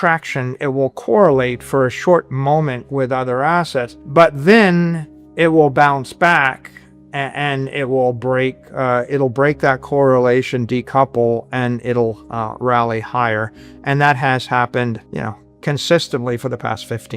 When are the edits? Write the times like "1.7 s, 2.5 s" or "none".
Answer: 4.0 s, 15.1 s